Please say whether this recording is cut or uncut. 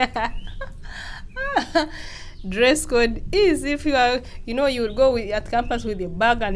uncut